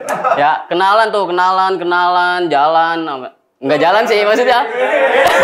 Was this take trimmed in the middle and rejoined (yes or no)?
no